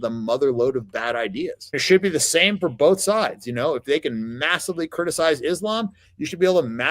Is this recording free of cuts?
no; 1 cut; at 1.8 s

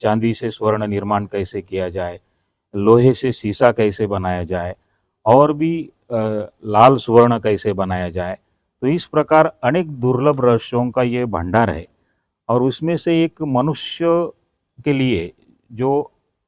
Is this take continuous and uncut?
yes; 0 cuts

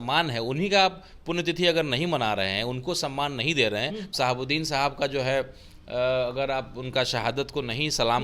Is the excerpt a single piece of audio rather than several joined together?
no; 1 cut; at 4.1 s

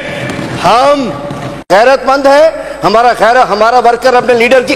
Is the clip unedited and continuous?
no; 1 cut; at 1.6 s

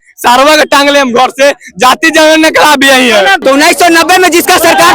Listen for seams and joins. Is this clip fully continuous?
no; 1 cut; at 3.4 s

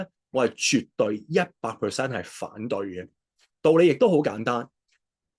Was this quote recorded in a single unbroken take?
yes; 0 cuts

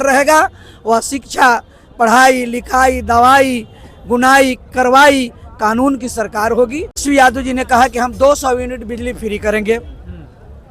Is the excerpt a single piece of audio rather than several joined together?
no; 1 cut; at 7.0 s

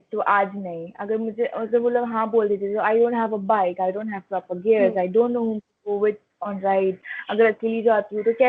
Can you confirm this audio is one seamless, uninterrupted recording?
yes; 0 cuts

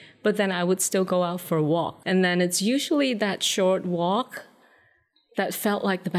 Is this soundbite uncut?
no; 1 cut; at 2.0 s

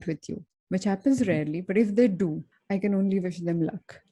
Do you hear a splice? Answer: yes; 1 cut; at 2.5 s

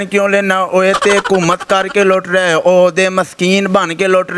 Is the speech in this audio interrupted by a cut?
no; 0 cuts

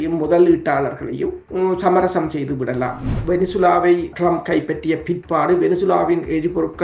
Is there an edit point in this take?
yes; 3 cuts; at 1.4 s, 3.2 s, 4.1 s

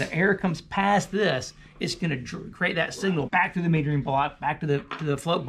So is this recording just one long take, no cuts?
no; 1 cut; at 3.3 s

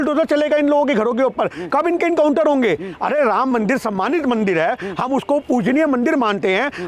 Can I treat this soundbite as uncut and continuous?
yes; 0 cuts

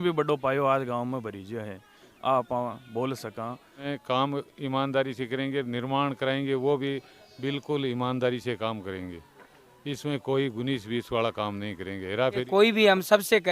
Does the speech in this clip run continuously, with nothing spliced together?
no; 2 cuts; at 3.9 s, 12.4 s

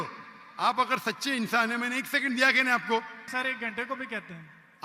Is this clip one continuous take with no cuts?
no; 1 cut; at 3.3 s

